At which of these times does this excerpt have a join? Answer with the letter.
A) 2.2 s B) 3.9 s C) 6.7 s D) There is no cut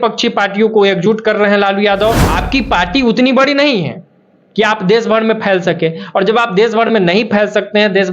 A